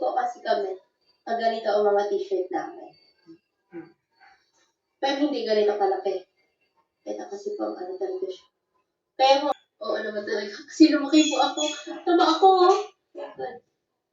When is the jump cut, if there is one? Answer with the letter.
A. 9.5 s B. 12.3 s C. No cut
A